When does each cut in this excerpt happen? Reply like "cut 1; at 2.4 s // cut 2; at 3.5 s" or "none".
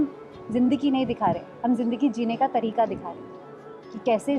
none